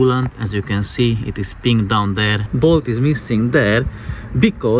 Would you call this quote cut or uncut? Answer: cut